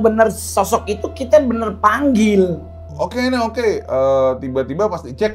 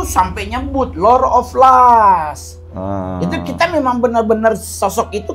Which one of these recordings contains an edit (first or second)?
first